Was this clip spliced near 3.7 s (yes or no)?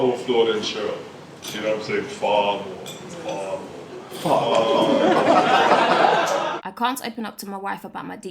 no